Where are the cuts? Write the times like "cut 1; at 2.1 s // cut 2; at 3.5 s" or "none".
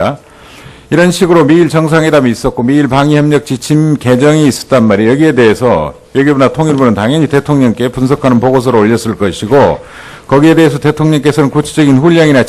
cut 1; at 1.1 s